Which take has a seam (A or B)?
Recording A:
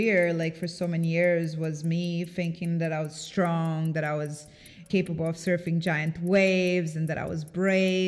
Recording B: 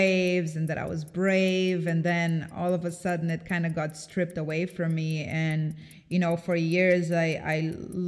A